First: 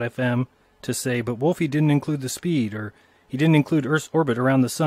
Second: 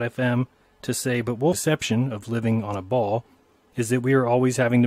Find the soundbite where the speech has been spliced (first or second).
first